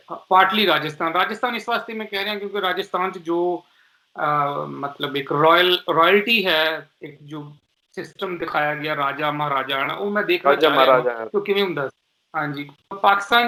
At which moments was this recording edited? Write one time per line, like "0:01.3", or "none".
none